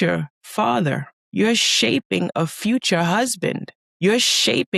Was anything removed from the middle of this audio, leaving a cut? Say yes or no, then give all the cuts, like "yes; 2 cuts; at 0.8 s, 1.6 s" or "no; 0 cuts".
no; 0 cuts